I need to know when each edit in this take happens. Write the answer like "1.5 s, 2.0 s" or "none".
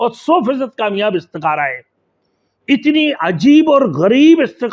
none